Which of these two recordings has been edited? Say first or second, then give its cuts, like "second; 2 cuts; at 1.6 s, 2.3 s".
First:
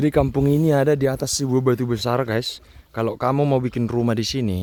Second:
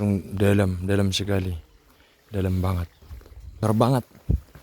second; 1 cut; at 3.5 s